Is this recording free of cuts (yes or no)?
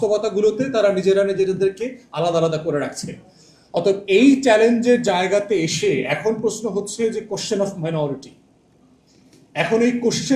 yes